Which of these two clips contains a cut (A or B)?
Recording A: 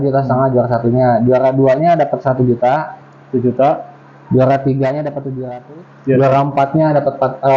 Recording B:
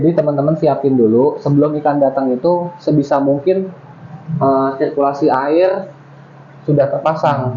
A